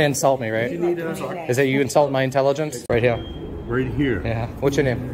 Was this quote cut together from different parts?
yes; 1 cut; at 2.8 s

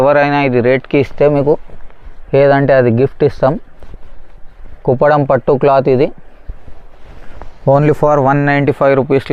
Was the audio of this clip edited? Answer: no; 0 cuts

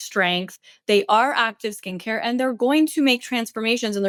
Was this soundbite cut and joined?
no; 0 cuts

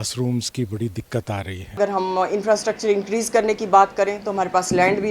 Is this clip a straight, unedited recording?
no; 1 cut; at 1.8 s

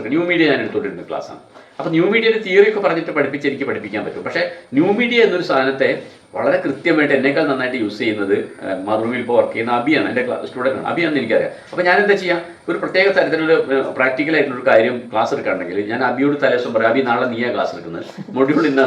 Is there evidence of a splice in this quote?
no; 0 cuts

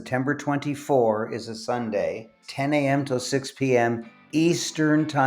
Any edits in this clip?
yes; 1 cut; at 2.4 s

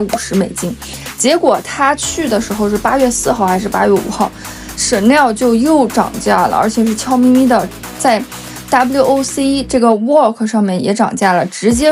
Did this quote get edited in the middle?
no; 0 cuts

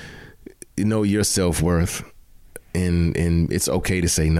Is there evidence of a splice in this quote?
no; 0 cuts

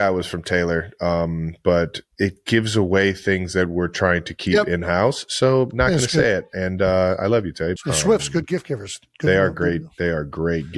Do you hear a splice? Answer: yes; 1 cut; at 7.8 s

